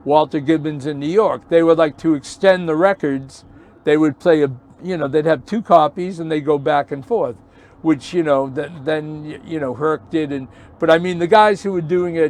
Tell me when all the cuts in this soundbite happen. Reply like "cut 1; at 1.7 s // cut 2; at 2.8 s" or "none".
none